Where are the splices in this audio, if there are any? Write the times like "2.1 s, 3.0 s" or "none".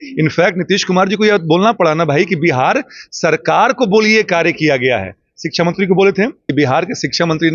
6.5 s